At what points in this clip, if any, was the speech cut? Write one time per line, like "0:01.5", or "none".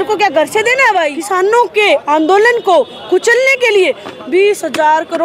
0:01.2